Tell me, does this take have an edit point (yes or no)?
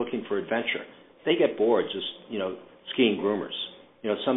yes